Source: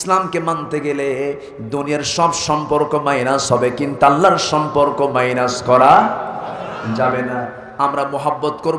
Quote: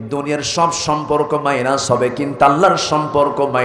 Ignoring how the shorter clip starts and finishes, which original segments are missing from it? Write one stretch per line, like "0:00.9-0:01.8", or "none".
none